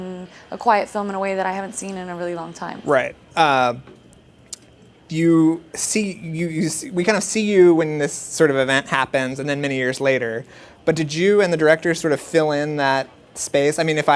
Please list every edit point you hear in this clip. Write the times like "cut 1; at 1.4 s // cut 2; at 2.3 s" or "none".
cut 1; at 6.7 s